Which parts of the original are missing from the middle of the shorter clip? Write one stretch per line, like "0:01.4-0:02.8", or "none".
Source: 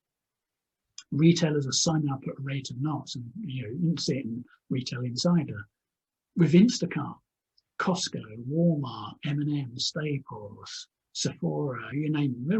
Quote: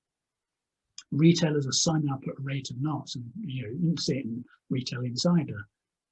none